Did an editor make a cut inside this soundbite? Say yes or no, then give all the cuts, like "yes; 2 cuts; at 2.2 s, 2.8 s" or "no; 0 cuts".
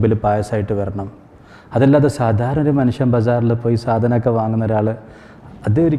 no; 0 cuts